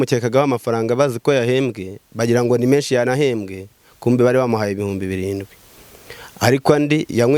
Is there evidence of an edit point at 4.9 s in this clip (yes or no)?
no